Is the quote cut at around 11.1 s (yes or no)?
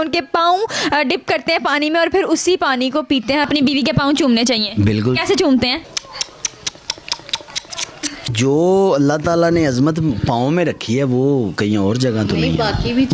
no